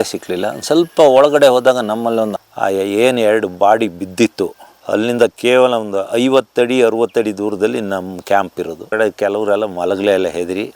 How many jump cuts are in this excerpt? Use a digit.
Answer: 2